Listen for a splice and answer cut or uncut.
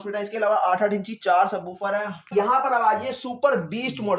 cut